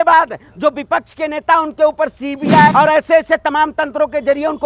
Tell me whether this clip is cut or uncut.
cut